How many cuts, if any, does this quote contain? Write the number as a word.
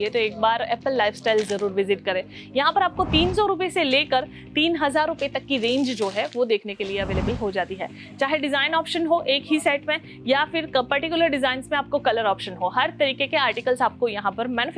zero